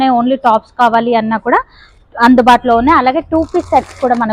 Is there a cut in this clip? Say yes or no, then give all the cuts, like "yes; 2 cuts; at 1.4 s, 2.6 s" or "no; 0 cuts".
no; 0 cuts